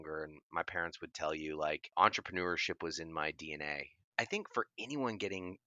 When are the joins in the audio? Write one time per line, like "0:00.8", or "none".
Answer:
0:01.9
0:04.1

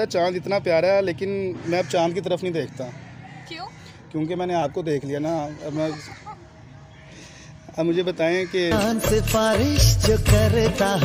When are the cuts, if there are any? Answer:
none

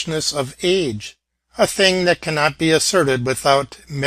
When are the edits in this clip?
0:02.4

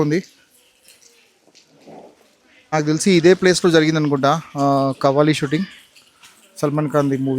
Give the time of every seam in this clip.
0:02.7

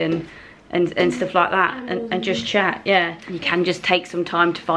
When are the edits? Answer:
0:03.2

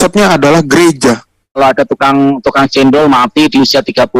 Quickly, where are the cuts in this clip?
0:01.6

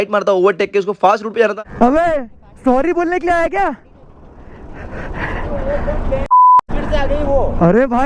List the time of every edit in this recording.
0:01.5

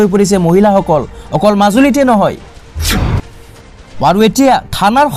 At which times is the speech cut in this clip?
none

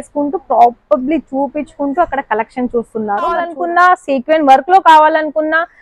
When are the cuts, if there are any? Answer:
0:03.5

